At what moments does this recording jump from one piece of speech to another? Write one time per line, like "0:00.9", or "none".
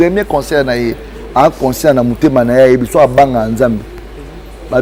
none